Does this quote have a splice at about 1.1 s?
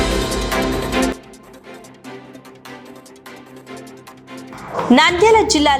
yes; 2 cuts; at 1.1 s, 4.2 s

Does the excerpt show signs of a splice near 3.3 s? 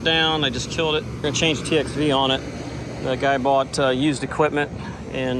no; 1 cut; at 1.2 s

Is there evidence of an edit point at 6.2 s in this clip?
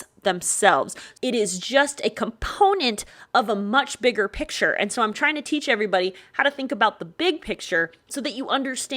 no; 1 cut; at 1.0 s

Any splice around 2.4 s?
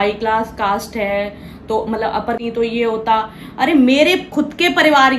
yes; 1 cut; at 2.4 s

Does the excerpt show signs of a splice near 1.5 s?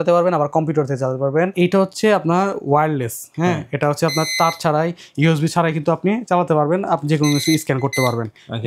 yes; 1 cut; at 1.5 s

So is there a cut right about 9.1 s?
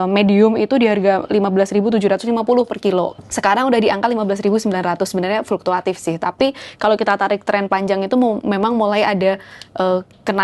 no; 0 cuts

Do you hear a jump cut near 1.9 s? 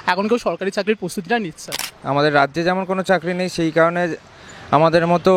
yes; 1 cut; at 1.9 s

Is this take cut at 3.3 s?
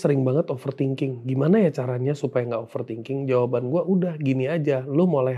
no; 0 cuts

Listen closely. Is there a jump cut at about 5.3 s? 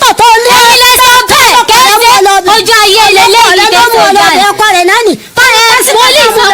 no; 0 cuts

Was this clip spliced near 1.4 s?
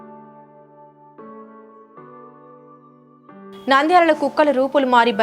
yes; 1 cut; at 1.4 s

